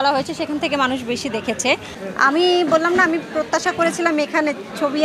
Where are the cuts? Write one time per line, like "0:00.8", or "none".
0:02.0